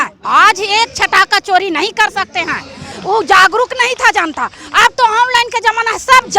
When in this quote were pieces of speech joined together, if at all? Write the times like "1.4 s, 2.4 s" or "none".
2.9 s